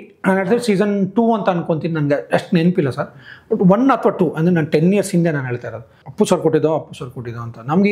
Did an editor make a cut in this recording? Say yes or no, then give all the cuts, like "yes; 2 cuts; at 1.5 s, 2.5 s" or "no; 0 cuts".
yes; 1 cut; at 6.0 s